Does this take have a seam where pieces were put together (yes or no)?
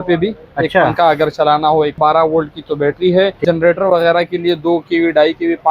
yes